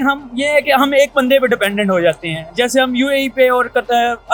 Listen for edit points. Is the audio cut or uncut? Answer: uncut